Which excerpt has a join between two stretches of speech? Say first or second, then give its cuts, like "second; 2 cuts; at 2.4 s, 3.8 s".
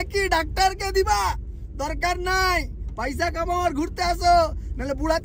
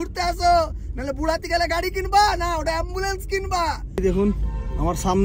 second; 1 cut; at 4.0 s